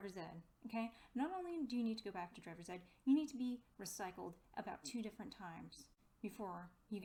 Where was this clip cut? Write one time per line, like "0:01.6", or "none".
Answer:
none